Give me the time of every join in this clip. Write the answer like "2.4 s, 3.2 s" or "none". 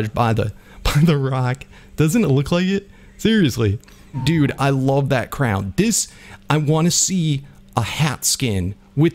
4.1 s